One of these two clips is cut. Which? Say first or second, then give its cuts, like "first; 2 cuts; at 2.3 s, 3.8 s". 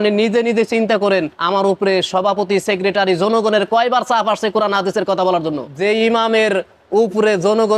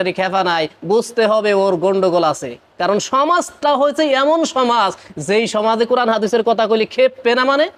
first; 2 cuts; at 1.4 s, 5.7 s